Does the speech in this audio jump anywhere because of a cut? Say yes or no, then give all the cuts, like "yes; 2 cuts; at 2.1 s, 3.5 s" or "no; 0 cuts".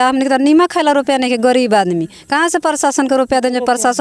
no; 0 cuts